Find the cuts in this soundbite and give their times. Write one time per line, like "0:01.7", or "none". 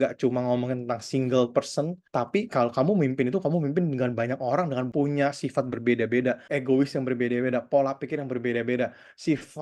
0:02.0
0:04.9
0:06.4